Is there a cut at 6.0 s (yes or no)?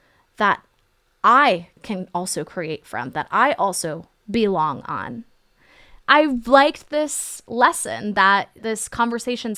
yes